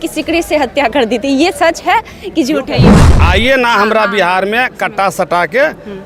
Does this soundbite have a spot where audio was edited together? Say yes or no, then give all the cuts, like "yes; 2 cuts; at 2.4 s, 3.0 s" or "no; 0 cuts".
yes; 1 cut; at 3.0 s